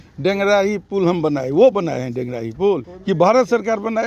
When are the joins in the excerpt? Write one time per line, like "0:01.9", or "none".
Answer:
0:02.9